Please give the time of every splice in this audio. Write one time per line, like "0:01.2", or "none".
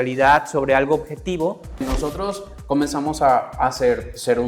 0:01.9